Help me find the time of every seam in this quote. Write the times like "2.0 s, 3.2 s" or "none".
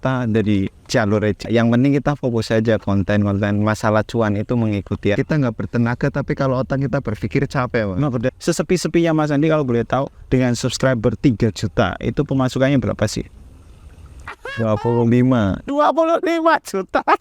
1.4 s, 5.2 s, 8.3 s